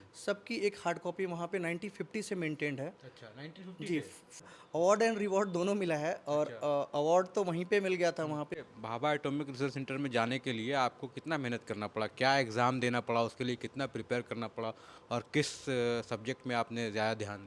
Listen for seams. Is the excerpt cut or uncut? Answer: cut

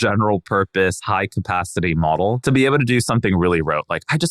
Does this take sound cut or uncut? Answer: cut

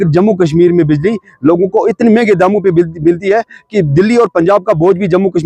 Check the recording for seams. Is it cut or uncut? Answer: uncut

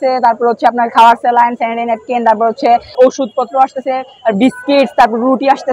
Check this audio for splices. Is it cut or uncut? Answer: cut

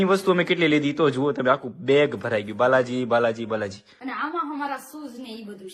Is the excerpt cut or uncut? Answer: uncut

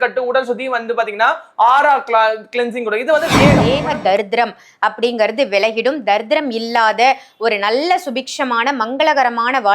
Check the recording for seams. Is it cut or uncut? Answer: cut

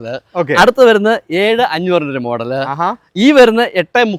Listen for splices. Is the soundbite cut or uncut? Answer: uncut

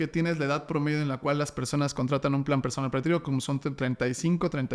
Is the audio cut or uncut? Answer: uncut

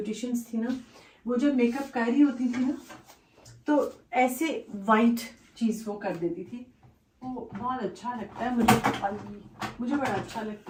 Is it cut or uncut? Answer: uncut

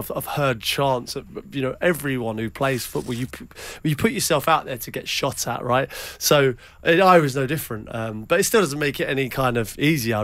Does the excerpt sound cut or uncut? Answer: uncut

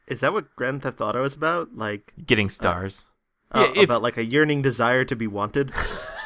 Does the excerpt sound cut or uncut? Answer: uncut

